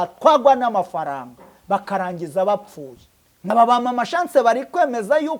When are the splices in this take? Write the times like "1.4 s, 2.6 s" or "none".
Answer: 3.5 s